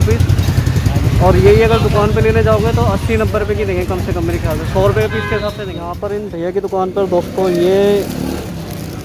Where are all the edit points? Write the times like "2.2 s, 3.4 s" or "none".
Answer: 5.7 s

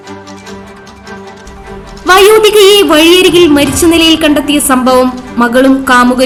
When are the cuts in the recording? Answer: none

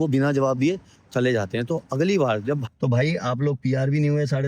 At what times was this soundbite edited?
2.6 s

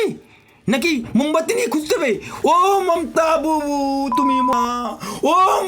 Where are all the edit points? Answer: 4.5 s

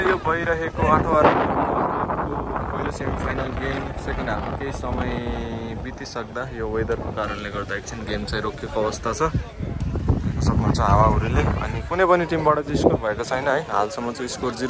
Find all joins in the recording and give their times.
none

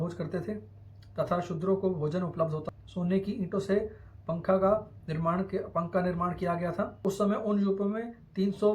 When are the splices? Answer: 2.6 s, 7.0 s

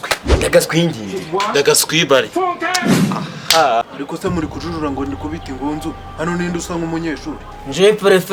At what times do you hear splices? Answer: none

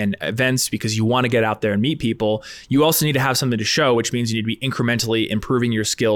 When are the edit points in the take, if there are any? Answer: none

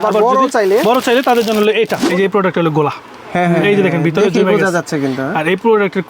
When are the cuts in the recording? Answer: 2.1 s

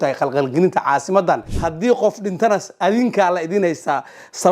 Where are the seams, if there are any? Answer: 1.5 s

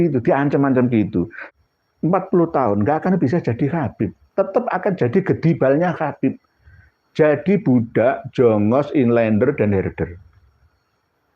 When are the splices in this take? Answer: 1.4 s

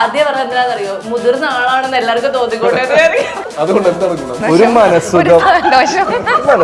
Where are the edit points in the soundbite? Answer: 3.4 s, 4.4 s

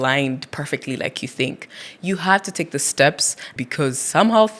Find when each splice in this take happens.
3.5 s

